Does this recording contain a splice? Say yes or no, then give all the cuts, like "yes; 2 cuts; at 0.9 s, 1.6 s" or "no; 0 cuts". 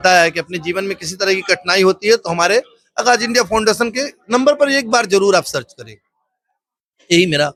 no; 0 cuts